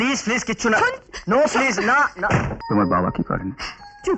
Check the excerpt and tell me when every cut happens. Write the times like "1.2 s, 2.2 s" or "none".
2.6 s